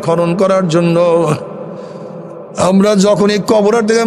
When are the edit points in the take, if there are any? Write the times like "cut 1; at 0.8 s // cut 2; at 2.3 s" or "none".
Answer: none